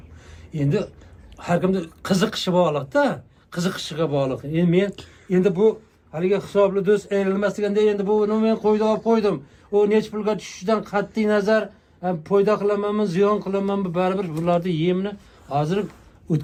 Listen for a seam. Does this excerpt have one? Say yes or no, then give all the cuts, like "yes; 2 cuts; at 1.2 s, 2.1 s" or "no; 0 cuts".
no; 0 cuts